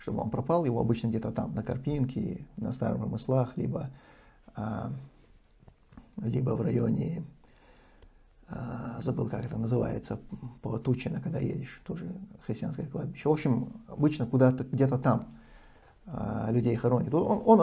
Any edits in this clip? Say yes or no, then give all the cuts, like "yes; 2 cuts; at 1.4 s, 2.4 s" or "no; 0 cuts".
no; 0 cuts